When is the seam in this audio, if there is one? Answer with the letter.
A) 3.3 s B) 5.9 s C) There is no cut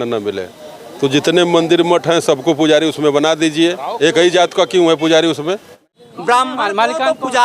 B